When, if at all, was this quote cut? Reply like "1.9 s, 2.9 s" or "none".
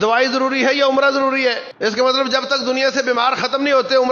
1.7 s

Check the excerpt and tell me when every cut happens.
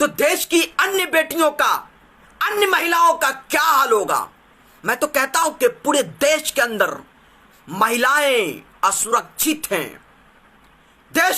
none

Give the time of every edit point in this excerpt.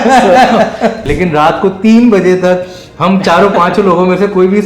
1.0 s

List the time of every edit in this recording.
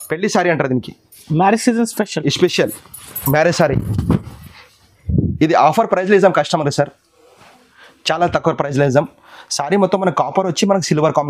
none

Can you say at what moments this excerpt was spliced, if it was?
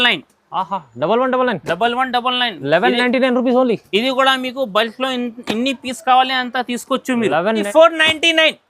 7.7 s

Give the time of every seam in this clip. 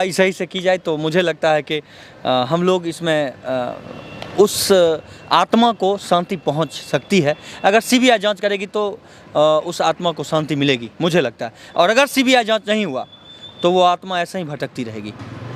none

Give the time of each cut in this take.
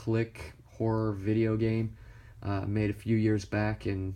none

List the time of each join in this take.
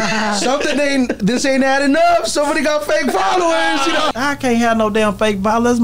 4.1 s

